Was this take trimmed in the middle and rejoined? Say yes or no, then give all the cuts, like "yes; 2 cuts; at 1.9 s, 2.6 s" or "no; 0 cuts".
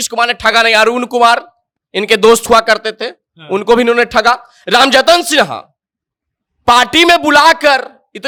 no; 0 cuts